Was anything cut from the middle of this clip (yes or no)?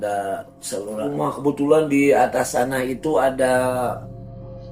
yes